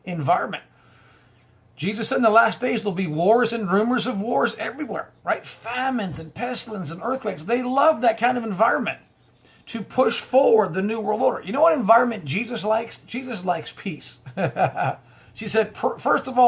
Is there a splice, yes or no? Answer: yes